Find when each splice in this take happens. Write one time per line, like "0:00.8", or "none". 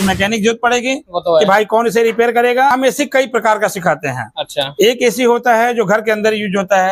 0:02.7